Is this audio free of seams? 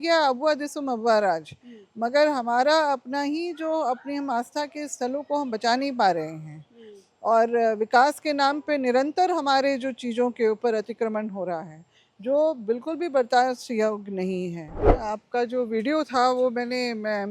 no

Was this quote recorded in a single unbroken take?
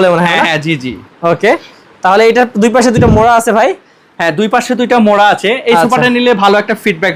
yes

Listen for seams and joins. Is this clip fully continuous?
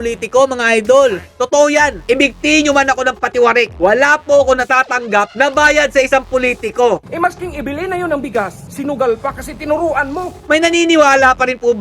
no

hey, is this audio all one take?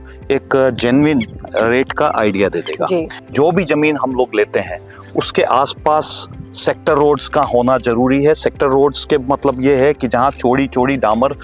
no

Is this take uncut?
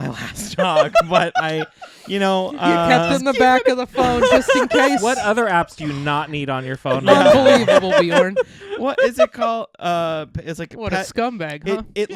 yes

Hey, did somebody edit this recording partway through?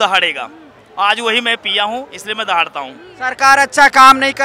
yes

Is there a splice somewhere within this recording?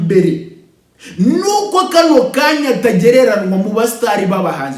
no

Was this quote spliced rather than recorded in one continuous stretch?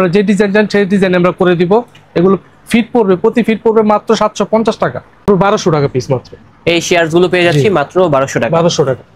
yes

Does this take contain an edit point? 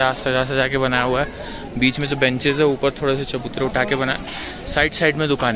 no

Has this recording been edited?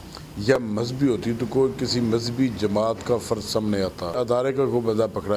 yes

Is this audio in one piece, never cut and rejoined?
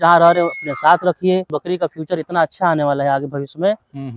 no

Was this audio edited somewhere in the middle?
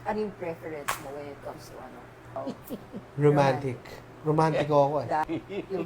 yes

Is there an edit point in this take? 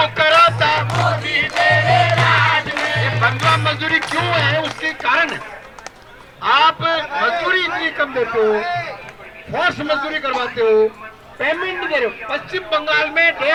no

